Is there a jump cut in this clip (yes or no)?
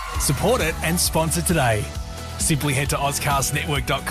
no